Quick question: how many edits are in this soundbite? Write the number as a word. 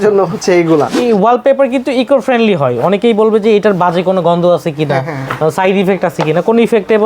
one